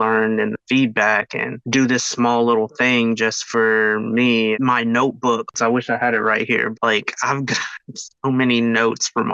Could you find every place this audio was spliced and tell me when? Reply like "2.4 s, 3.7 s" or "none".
5.5 s, 6.7 s